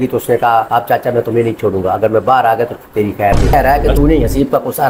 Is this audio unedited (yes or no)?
no